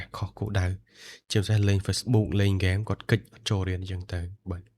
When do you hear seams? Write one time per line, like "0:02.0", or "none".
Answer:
0:02.0

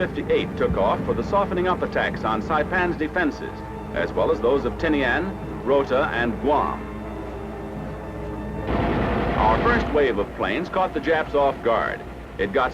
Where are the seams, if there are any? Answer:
0:11.3

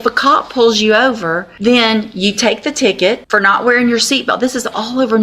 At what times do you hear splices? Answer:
0:01.5
0:03.2

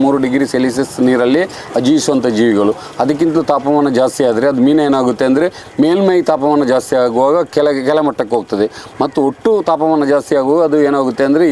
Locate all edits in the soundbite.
none

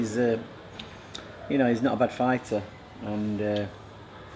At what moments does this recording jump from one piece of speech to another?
0:03.4

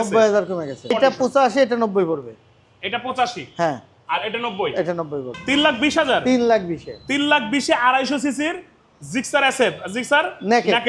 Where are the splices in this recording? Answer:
0:00.9
0:05.3

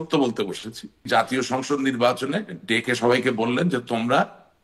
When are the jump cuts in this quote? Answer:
0:01.1

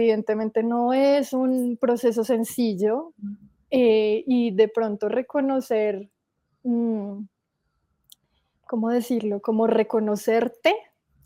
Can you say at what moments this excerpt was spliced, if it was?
none

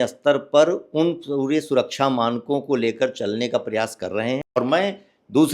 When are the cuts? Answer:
0:04.5

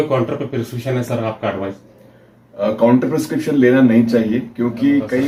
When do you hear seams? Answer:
none

